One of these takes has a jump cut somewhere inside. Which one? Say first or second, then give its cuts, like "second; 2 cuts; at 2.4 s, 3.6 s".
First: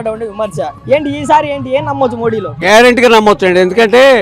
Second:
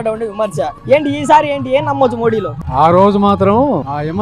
first; 1 cut; at 2.5 s